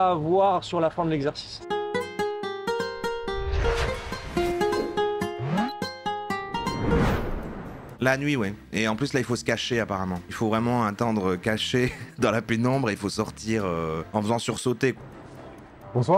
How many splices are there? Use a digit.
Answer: 3